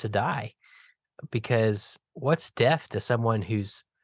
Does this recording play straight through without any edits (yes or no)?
no